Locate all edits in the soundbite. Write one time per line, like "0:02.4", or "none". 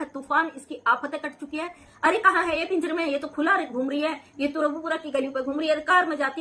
0:01.9